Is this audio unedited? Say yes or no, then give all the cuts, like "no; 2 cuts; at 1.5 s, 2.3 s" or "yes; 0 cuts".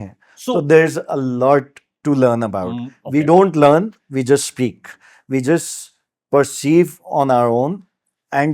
yes; 0 cuts